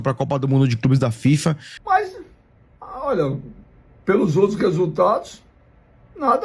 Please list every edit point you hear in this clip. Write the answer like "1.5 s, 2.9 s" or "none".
1.7 s